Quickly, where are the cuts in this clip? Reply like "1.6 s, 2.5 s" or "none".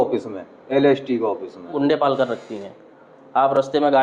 1.7 s